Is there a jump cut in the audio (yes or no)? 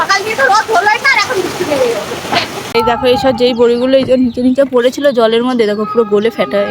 yes